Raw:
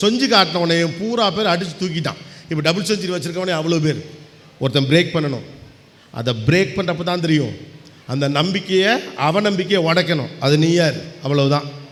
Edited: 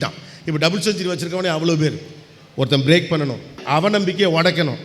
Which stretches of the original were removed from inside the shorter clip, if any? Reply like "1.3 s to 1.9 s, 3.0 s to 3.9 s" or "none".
5.6 s to 9.1 s